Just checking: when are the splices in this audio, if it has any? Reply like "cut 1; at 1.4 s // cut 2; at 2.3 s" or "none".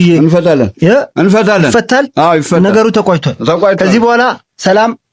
none